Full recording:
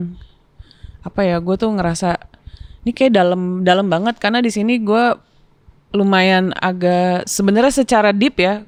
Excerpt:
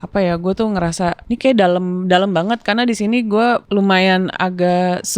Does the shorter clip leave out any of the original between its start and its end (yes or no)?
yes